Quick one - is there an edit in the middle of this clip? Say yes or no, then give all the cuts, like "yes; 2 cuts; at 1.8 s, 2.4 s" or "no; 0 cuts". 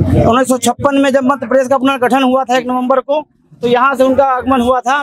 no; 0 cuts